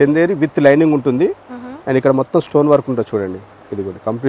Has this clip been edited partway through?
no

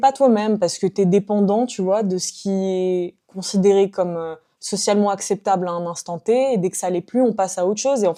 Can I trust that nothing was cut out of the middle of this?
yes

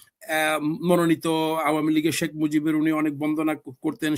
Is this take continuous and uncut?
yes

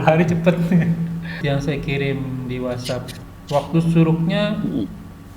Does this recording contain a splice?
yes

